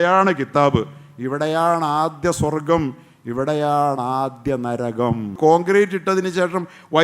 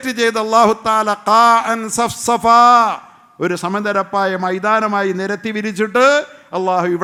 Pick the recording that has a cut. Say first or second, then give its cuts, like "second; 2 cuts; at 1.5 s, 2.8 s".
first; 1 cut; at 5.4 s